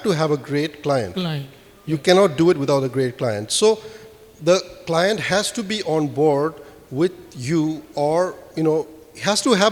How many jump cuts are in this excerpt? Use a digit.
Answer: 0